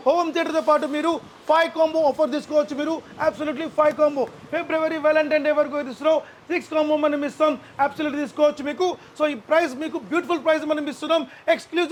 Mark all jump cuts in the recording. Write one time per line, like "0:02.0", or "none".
none